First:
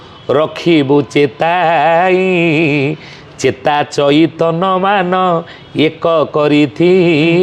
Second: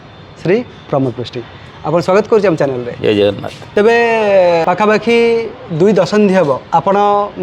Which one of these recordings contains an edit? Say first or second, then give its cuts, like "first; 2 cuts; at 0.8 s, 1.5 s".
second; 3 cuts; at 3.5 s, 4.6 s, 6.6 s